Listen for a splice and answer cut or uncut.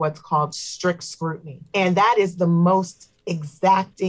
cut